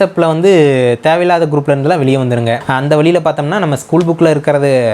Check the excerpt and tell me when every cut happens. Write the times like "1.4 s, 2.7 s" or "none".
2.6 s